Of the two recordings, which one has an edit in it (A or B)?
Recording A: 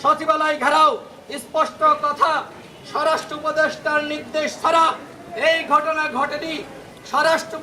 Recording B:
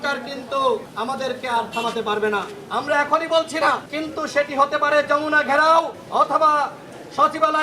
B